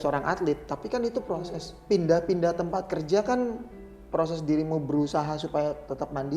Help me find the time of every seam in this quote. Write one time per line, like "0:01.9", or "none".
none